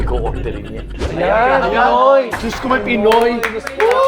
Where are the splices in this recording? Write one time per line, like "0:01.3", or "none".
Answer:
0:01.0